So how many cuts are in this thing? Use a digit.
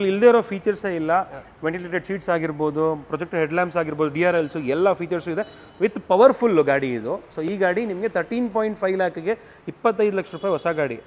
0